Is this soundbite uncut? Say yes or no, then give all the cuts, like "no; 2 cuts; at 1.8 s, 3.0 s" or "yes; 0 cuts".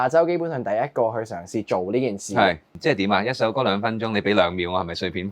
no; 1 cut; at 2.7 s